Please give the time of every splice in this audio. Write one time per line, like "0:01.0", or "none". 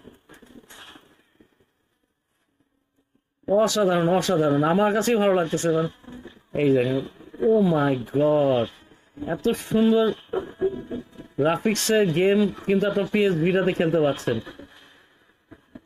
none